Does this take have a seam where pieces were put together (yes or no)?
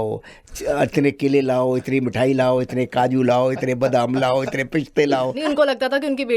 yes